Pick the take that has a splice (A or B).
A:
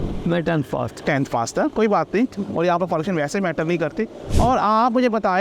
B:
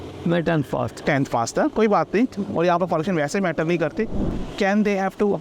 B